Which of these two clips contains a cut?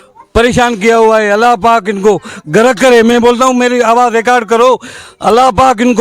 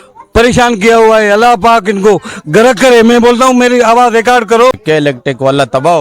second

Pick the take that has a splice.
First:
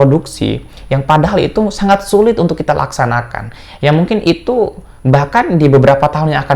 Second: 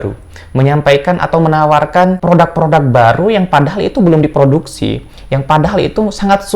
second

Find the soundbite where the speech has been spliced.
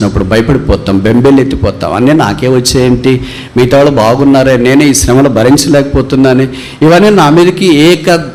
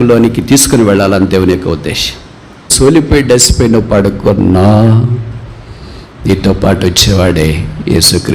second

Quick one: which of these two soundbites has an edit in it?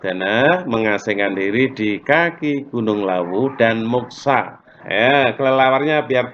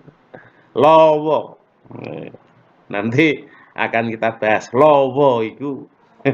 first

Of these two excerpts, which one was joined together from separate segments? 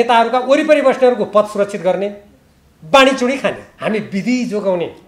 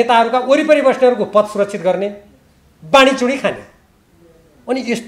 first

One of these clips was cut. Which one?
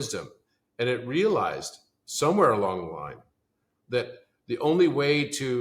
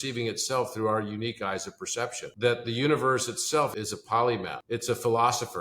second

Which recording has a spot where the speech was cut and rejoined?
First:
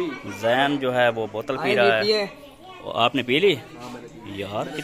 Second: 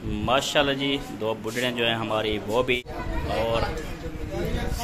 second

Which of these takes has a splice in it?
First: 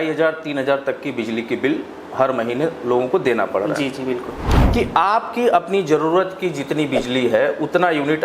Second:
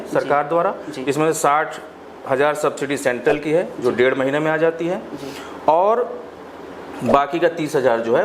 first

